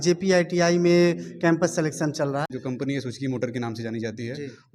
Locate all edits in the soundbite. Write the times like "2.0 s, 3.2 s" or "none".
2.5 s